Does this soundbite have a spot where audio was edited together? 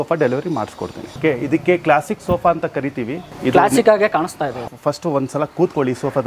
yes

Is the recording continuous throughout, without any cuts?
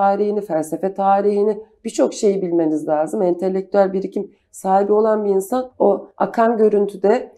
no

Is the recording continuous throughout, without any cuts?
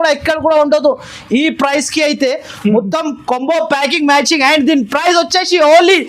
yes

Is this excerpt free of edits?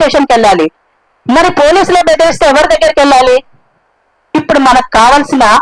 yes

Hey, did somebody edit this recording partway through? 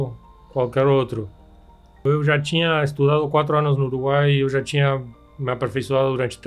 yes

